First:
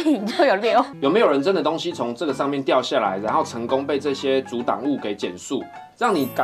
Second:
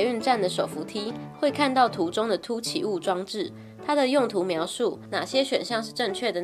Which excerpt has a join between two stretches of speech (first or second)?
first